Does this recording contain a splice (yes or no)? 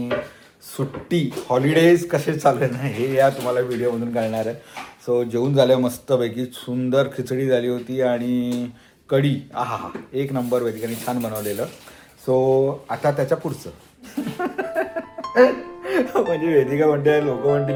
no